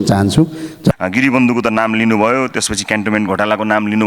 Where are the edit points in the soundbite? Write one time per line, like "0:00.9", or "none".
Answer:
0:00.9